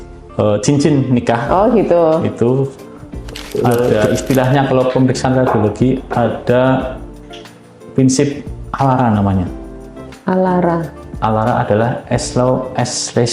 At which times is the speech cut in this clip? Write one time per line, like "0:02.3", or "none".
0:03.9